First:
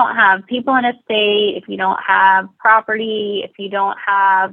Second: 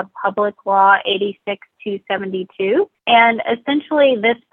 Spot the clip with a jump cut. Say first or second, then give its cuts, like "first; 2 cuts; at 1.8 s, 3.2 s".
second; 1 cut; at 3.0 s